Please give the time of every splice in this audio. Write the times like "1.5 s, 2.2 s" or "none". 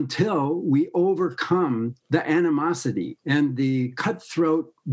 1.9 s, 3.2 s